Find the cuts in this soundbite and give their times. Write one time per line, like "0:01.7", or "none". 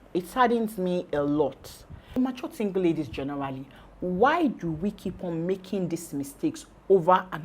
0:02.2